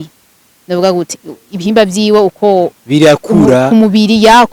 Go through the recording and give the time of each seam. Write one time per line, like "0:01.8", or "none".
none